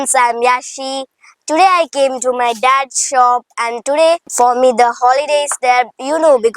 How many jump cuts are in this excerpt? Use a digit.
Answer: 1